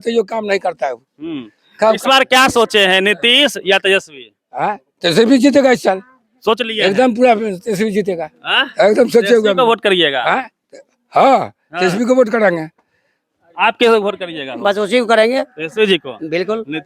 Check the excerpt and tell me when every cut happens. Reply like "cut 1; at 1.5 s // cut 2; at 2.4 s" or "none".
none